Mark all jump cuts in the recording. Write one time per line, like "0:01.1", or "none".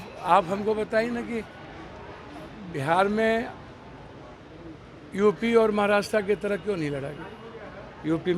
none